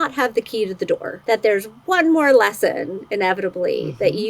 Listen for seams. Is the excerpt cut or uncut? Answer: cut